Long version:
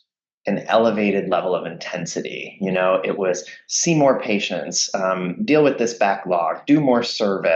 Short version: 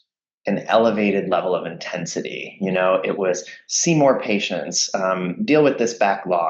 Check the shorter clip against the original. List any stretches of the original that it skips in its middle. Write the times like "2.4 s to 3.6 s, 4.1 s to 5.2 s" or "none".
none

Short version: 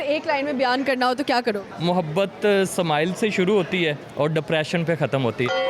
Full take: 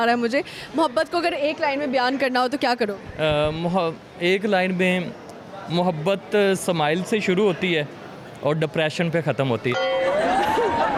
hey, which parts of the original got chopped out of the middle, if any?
3.0 s to 5.6 s, 7.9 s to 8.3 s

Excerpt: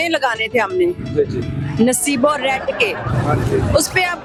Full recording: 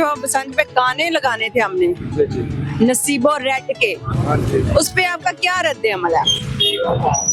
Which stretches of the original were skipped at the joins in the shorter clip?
none

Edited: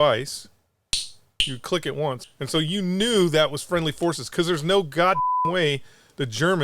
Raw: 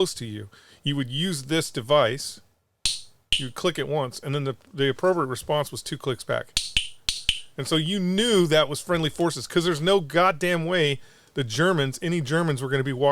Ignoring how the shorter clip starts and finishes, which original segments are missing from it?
4.2 s to 7.4 s

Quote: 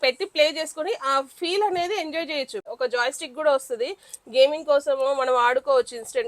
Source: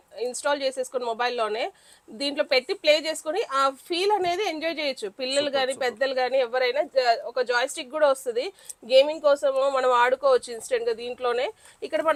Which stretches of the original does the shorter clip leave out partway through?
5.2 s to 7.2 s

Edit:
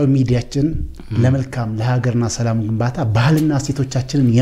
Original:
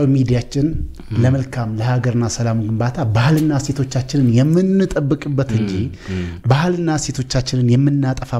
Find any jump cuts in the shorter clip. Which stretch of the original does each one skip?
none

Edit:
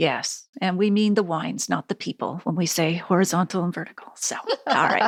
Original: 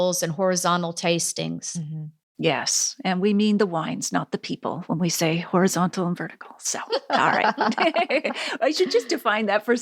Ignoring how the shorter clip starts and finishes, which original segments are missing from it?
none

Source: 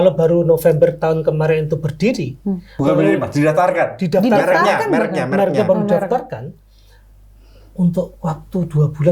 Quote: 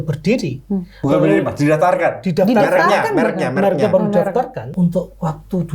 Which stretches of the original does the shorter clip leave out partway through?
6.4 s to 7.6 s

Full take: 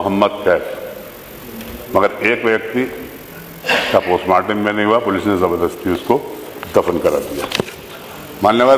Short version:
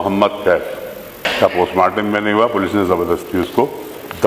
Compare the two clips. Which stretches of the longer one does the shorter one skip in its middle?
1.3 s to 3.8 s

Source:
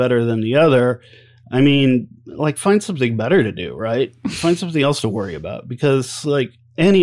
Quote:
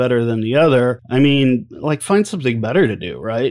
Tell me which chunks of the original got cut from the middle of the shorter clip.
1.0 s to 1.4 s, 2.1 s to 2.3 s

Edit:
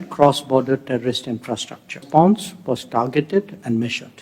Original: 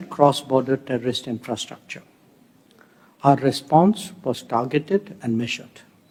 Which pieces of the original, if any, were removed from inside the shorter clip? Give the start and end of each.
2.0 s to 3.6 s

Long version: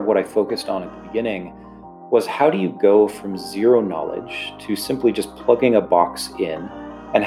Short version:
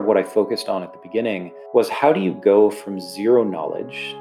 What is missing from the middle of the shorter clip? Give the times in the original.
1.5 s to 1.9 s

